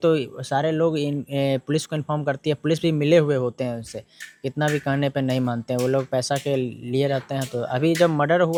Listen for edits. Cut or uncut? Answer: uncut